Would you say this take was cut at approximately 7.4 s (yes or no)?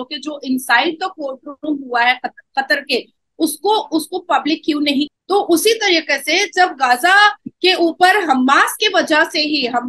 no